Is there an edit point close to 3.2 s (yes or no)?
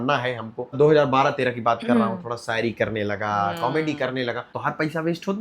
no